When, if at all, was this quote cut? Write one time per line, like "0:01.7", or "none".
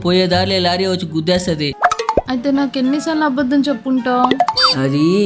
0:01.7